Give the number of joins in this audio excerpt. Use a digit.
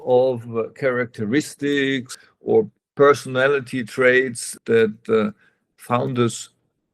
2